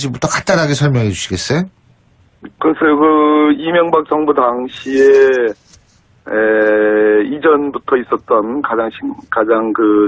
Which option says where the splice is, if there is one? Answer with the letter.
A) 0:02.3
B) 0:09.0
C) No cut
A